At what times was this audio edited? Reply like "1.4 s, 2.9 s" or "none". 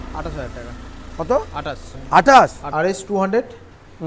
2.6 s